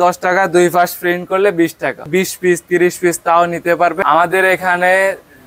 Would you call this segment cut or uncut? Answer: cut